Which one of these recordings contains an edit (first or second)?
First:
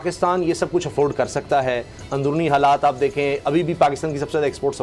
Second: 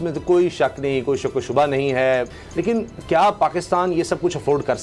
second